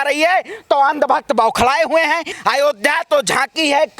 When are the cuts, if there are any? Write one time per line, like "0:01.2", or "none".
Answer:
0:02.3